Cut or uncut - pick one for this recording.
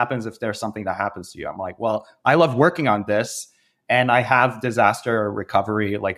uncut